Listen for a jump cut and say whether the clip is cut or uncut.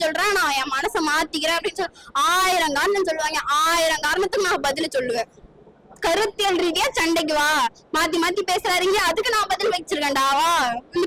uncut